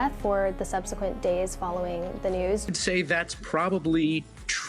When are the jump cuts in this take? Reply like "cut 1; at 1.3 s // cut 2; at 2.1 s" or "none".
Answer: cut 1; at 2.6 s

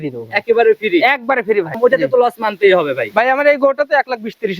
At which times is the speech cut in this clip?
cut 1; at 1.7 s

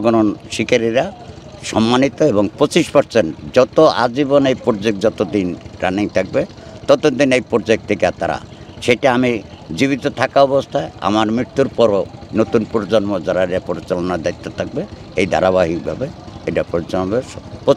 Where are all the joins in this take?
none

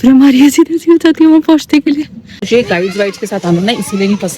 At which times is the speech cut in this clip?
cut 1; at 2.1 s

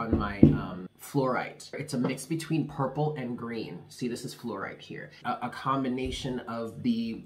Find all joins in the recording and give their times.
cut 1; at 0.9 s // cut 2; at 1.8 s // cut 3; at 5.1 s

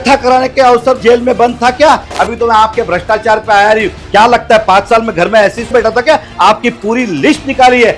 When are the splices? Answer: cut 1; at 1.0 s // cut 2; at 2.1 s // cut 3; at 5.7 s

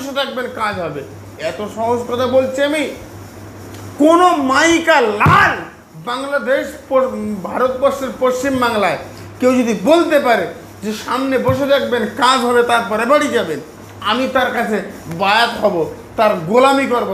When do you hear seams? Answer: none

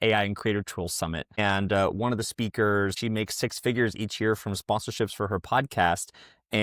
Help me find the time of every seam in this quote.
cut 1; at 1.4 s // cut 2; at 3.0 s

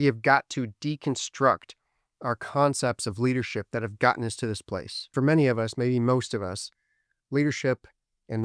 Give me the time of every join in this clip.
cut 1; at 5.0 s

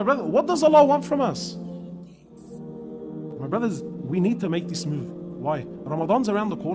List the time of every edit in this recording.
cut 1; at 2.3 s

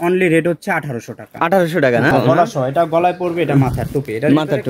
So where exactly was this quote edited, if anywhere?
cut 1; at 2.1 s

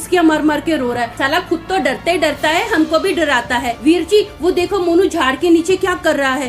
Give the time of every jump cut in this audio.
cut 1; at 1.2 s // cut 2; at 3.7 s

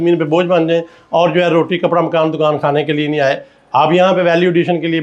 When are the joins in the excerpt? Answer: none

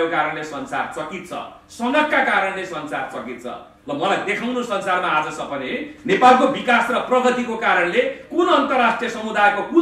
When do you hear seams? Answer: none

